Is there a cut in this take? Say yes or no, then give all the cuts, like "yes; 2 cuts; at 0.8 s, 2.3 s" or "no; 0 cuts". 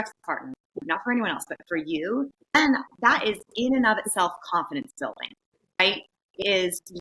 yes; 2 cuts; at 2.5 s, 5.9 s